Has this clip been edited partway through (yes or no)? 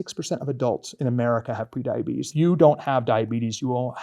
yes